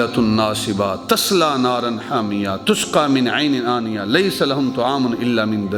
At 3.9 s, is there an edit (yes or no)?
no